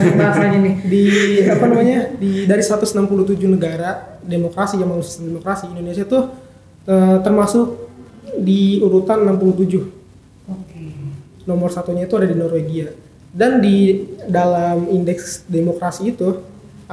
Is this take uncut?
yes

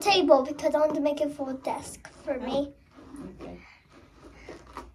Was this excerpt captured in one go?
yes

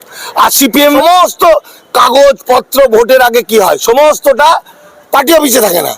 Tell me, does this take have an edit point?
yes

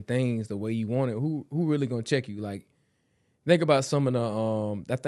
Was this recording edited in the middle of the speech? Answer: no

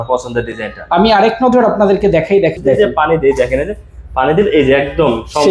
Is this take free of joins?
no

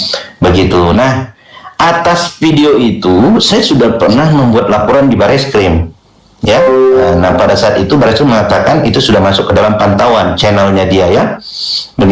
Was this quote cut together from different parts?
no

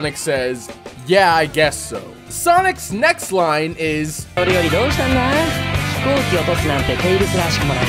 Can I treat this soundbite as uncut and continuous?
yes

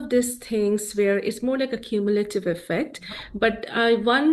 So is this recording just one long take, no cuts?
yes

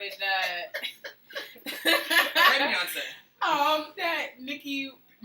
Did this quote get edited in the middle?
yes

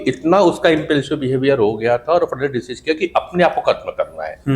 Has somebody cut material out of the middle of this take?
no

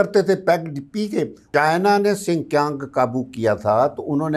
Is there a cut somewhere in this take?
yes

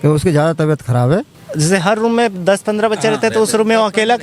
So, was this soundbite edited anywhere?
yes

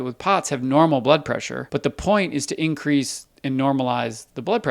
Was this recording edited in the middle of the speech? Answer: yes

